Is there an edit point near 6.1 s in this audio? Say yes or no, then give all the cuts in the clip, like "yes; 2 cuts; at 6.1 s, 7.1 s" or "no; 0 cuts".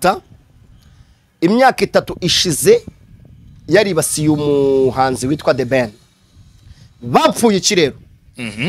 no; 0 cuts